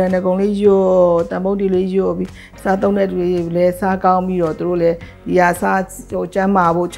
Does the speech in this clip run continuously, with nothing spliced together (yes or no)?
yes